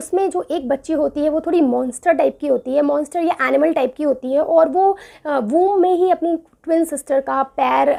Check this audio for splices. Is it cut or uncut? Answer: uncut